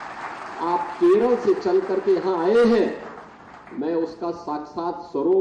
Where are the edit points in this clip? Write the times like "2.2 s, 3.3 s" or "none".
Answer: none